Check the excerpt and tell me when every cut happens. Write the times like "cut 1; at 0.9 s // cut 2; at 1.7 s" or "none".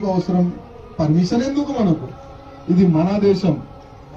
none